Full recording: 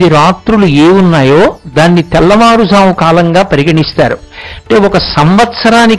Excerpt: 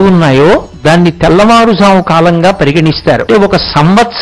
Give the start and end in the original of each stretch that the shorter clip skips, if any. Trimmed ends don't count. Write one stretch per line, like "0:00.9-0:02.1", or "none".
0:04.1-0:04.6